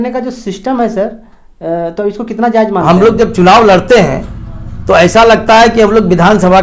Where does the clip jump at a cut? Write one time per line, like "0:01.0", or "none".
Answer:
0:02.9